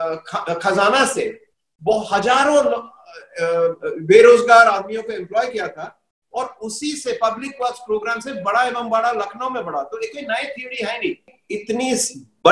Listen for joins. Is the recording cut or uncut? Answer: cut